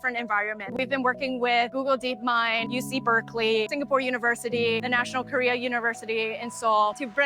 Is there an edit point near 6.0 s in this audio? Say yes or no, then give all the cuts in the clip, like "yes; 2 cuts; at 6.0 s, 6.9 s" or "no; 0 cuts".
no; 3 cuts; at 0.7 s, 2.7 s, 4.8 s